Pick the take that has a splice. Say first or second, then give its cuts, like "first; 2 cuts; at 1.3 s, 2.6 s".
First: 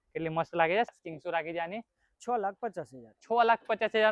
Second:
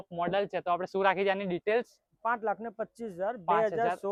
first; 1 cut; at 0.9 s